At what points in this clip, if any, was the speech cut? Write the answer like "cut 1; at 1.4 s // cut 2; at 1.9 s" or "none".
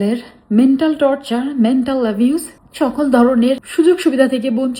cut 1; at 2.6 s // cut 2; at 3.6 s